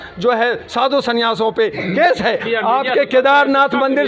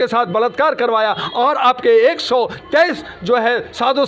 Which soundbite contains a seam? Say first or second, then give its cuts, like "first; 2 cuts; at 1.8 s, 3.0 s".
first; 1 cut; at 2.5 s